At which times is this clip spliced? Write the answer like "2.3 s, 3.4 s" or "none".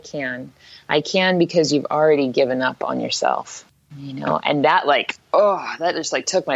3.6 s

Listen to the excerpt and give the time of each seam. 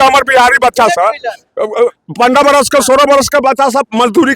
none

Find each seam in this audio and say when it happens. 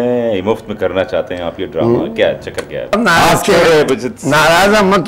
2.9 s

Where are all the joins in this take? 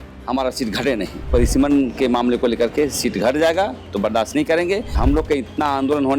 1.3 s, 5.0 s

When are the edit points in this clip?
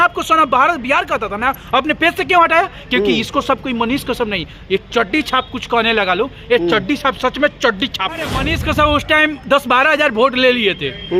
8.4 s

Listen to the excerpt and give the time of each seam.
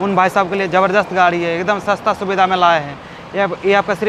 none

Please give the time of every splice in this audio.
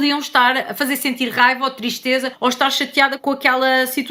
none

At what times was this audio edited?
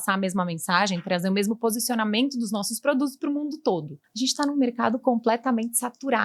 3.9 s

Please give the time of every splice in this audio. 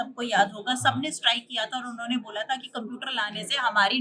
none

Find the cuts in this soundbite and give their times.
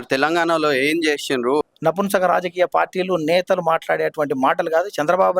1.6 s

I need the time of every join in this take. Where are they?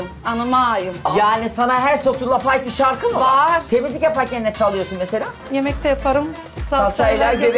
1.1 s, 5.4 s

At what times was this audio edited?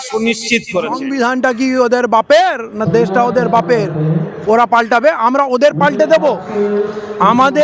1.1 s

